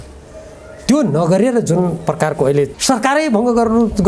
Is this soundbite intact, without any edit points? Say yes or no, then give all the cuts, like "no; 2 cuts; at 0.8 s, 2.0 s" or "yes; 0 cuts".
no; 1 cut; at 2.8 s